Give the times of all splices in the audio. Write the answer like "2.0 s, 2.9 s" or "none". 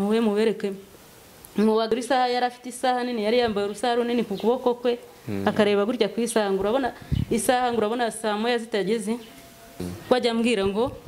1.9 s, 9.9 s